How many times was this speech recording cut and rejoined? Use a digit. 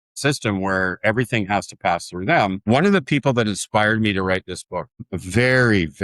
2